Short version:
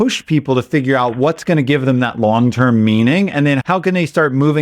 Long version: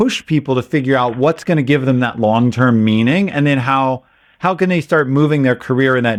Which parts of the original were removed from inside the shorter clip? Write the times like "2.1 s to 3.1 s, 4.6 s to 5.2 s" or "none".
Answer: 3.6 s to 4.4 s